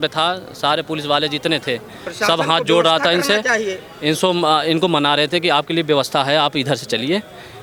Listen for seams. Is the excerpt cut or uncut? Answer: uncut